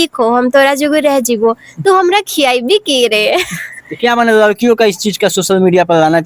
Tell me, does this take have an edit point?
yes; 1 cut; at 3.8 s

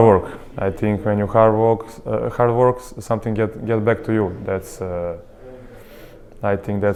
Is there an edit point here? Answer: no; 0 cuts

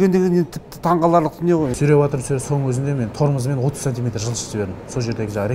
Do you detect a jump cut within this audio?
yes; 1 cut; at 1.7 s

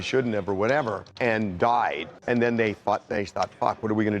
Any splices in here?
yes; 2 cuts; at 1.0 s, 2.1 s

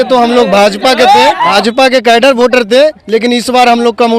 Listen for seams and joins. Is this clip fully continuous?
no; 1 cut; at 1.5 s

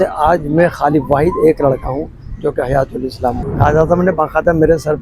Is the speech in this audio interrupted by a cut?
yes; 1 cut; at 3.4 s

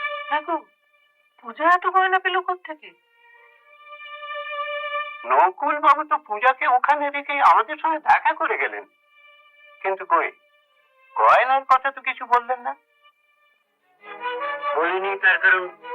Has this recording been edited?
no; 0 cuts

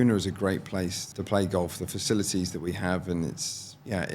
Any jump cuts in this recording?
yes; 1 cut; at 1.1 s

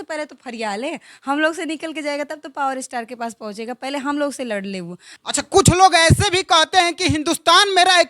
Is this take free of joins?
no; 1 cut; at 5.1 s

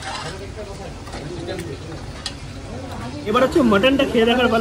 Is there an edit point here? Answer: yes; 1 cut; at 3.3 s

